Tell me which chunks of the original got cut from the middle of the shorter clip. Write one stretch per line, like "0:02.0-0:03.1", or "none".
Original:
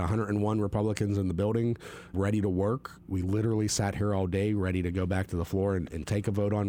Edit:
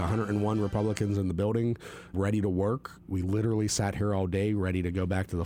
none